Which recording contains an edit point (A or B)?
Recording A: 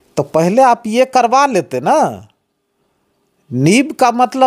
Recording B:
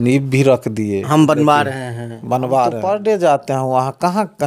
B